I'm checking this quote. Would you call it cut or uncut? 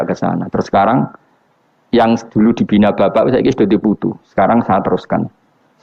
uncut